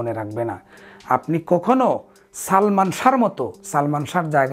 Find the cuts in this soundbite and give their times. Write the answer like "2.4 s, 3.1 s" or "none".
none